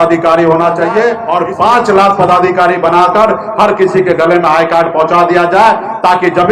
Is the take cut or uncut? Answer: cut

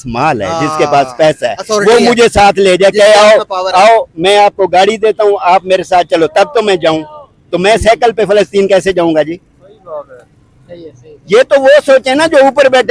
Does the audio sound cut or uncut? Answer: uncut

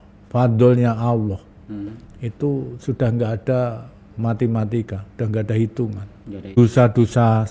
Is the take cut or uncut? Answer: cut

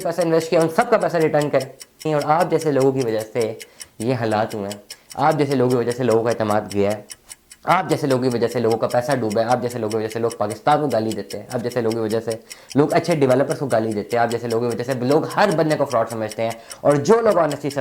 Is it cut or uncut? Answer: cut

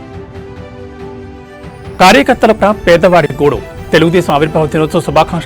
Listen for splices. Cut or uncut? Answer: cut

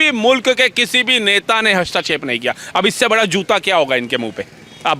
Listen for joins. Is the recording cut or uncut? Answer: uncut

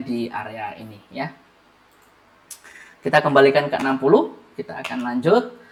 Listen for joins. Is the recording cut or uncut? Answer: uncut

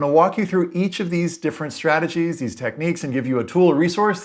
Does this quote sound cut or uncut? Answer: uncut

